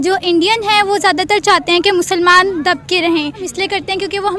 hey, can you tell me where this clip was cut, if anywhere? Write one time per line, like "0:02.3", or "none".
0:03.4